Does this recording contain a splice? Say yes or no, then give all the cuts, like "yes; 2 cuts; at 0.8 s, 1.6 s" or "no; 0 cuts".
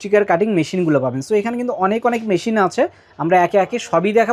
no; 0 cuts